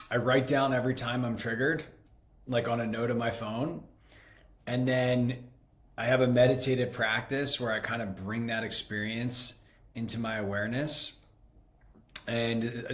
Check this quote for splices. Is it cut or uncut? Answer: uncut